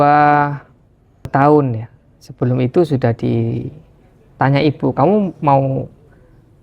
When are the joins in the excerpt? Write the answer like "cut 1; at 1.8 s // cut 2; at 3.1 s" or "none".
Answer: cut 1; at 1.3 s